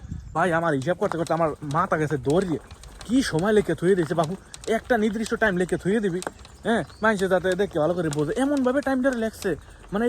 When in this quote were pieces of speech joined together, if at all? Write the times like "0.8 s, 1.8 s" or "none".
none